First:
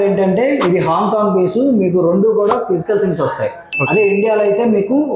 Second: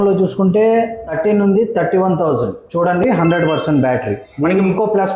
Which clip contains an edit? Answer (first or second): second